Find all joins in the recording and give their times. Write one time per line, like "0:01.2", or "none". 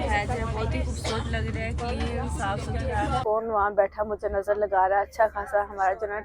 0:03.2